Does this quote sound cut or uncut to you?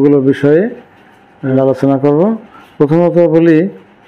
cut